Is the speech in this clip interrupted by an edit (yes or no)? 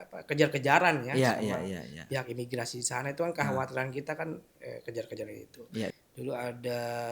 yes